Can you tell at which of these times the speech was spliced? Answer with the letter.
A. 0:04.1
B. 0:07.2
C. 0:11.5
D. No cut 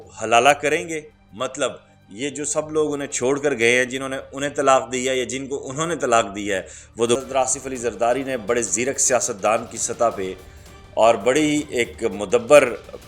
B